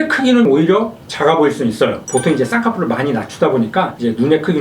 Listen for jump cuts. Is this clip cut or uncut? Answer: cut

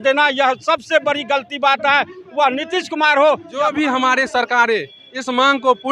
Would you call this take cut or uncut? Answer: cut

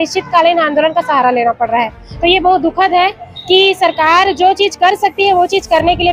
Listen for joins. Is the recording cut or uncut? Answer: uncut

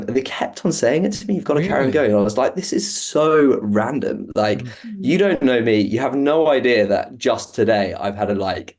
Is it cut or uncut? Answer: uncut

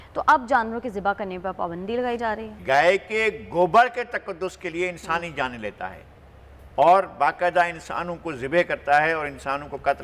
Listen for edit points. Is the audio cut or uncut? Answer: cut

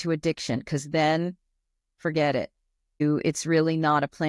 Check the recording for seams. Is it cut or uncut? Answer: cut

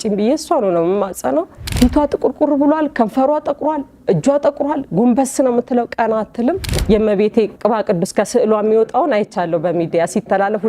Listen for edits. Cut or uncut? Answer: cut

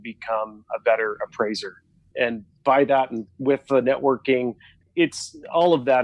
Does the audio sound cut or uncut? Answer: cut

